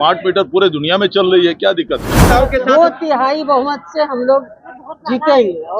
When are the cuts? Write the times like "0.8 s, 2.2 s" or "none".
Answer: 2.2 s